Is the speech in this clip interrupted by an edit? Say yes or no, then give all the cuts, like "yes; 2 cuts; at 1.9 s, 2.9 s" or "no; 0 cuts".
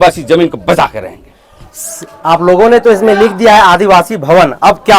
no; 0 cuts